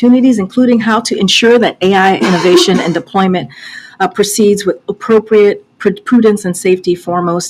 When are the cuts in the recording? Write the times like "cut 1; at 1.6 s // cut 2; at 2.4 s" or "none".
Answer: cut 1; at 2.3 s